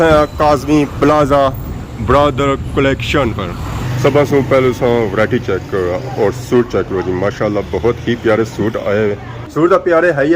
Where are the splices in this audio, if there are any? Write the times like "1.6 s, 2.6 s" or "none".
3.6 s